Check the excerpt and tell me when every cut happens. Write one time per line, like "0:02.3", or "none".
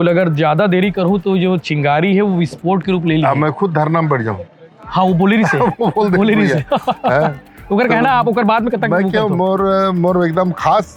none